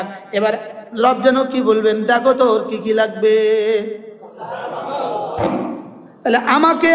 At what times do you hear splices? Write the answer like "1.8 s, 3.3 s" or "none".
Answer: none